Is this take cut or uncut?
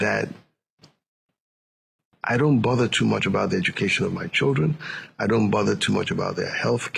uncut